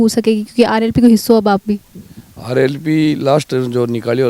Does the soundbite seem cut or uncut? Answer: uncut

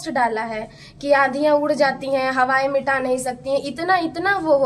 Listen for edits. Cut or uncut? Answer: uncut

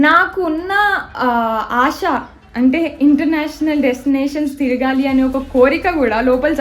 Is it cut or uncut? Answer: uncut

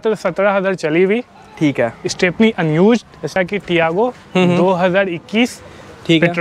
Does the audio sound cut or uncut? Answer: cut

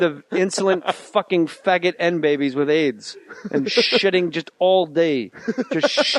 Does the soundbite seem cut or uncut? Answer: uncut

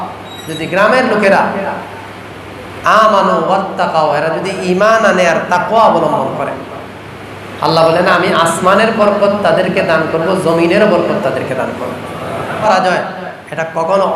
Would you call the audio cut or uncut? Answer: cut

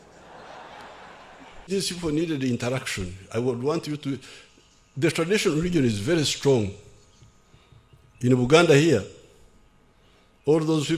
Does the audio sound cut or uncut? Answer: cut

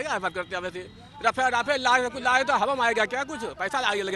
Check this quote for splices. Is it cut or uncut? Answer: uncut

